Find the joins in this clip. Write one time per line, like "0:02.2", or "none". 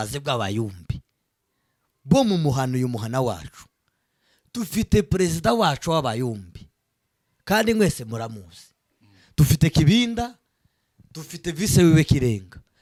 none